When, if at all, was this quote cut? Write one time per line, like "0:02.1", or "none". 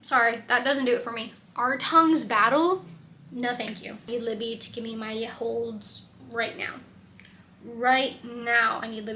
0:04.1

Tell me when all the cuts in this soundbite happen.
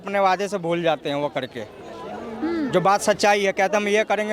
none

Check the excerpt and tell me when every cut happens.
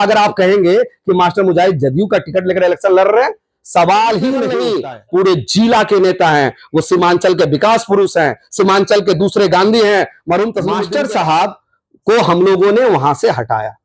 0:04.7
0:10.8

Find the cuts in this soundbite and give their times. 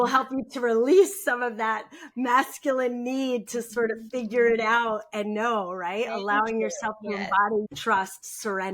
0:07.7

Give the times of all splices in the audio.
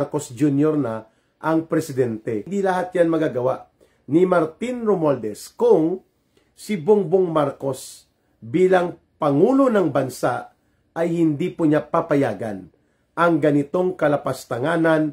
0:02.5

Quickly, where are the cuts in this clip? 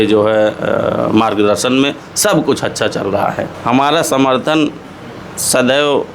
0:03.5

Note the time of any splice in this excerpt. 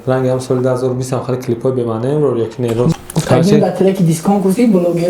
0:02.9

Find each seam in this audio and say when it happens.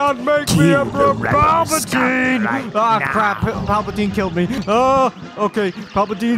none

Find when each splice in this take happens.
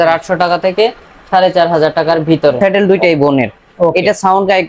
0:02.6

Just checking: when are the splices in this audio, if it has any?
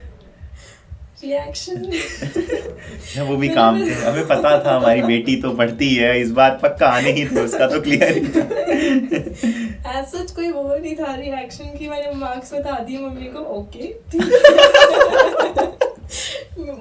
none

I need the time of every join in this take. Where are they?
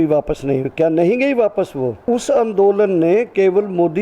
0:02.0

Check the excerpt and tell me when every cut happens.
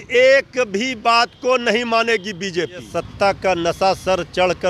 0:03.0

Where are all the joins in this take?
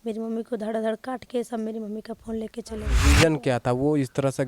0:02.9

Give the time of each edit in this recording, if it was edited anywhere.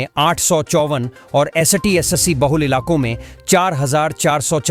none

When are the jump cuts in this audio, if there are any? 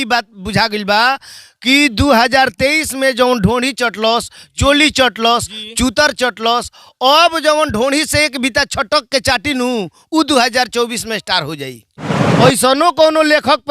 0:12.2

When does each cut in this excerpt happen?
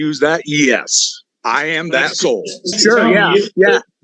0:02.7

